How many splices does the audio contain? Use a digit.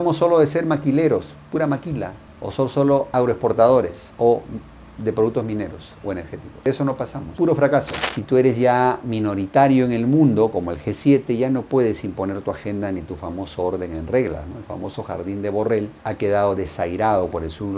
1